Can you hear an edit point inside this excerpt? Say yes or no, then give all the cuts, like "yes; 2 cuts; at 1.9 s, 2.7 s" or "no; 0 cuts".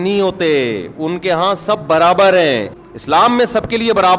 yes; 1 cut; at 2.8 s